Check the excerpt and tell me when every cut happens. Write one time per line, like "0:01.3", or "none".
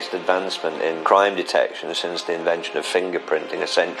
0:01.0

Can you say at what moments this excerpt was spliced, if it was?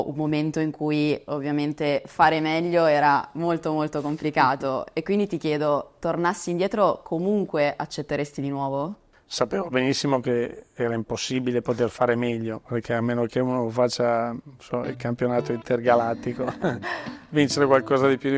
0:09.1

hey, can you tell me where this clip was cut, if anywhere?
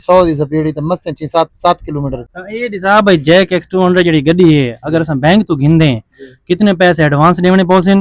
0:02.3

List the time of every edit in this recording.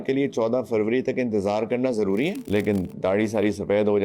0:02.4

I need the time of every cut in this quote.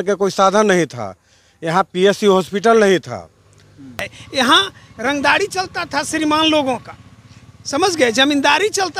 0:04.1

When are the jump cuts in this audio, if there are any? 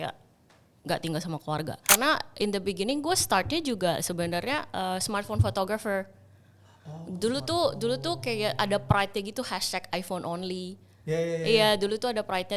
0:01.8

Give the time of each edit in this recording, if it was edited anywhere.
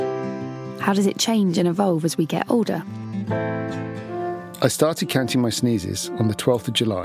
0:04.0

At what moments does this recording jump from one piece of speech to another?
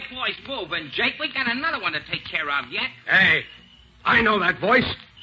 none

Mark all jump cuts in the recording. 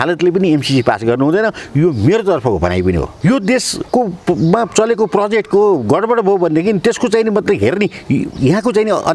0:03.1
0:03.8

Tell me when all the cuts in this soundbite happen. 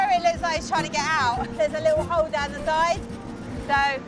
0:01.5

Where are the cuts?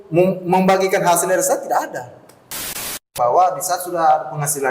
0:02.7

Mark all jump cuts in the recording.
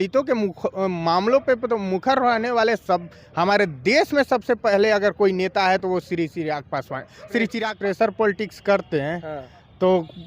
0:07.6

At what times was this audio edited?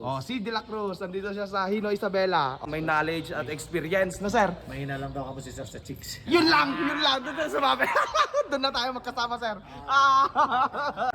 0:02.6

